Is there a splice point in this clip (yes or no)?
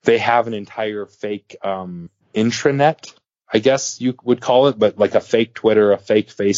yes